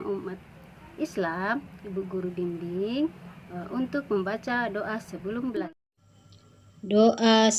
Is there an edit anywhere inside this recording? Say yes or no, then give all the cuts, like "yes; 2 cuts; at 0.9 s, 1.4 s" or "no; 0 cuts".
yes; 1 cut; at 5.7 s